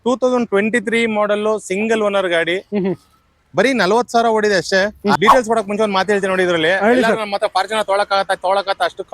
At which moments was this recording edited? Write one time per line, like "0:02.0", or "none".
0:05.2